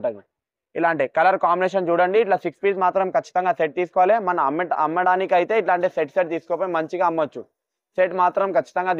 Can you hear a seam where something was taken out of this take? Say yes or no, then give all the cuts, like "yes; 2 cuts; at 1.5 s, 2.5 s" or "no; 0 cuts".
no; 0 cuts